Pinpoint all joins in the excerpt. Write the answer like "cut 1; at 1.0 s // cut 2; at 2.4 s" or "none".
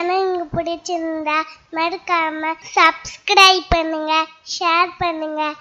cut 1; at 2.6 s